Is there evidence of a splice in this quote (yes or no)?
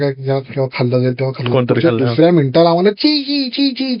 no